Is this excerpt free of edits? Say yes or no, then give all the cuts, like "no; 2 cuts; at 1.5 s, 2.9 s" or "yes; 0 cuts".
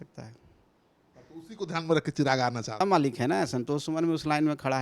no; 1 cut; at 2.8 s